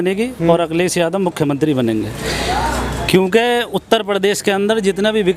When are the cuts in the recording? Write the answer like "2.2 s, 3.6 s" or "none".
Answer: none